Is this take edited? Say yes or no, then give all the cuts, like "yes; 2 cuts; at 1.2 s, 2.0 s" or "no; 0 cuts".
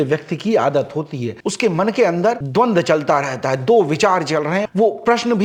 no; 0 cuts